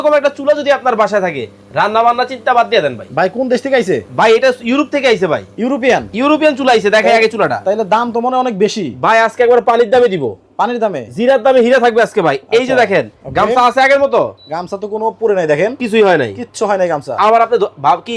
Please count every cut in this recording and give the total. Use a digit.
0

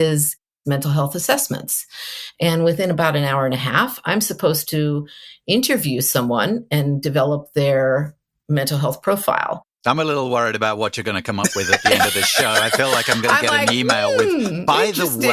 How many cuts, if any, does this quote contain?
0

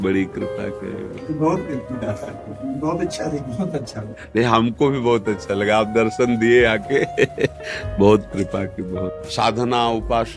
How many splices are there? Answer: 2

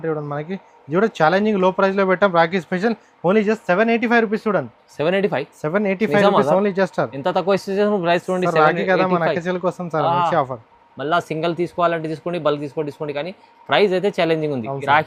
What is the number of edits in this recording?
0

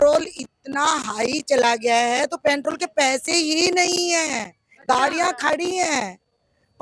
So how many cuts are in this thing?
0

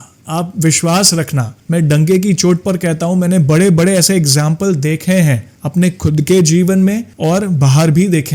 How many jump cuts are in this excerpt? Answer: 0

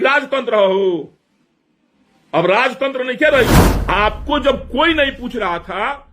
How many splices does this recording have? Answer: 1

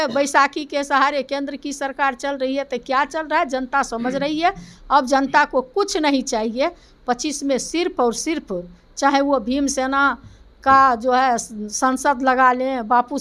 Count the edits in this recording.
0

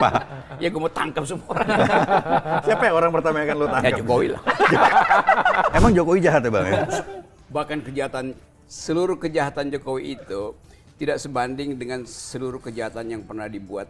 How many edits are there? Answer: 1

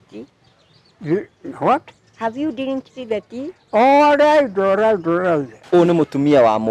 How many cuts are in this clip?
1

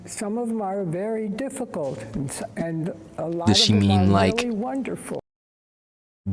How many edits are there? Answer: 0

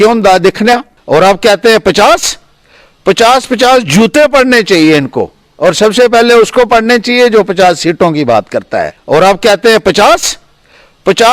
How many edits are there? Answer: 2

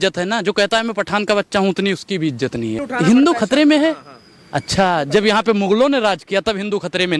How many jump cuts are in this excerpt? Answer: 1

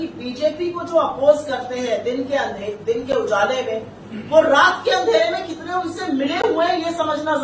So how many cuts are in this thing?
0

